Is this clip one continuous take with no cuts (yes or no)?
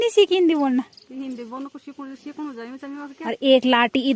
no